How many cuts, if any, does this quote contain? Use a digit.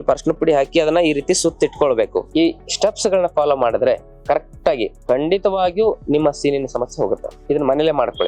2